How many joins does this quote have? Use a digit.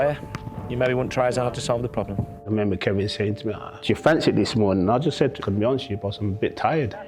3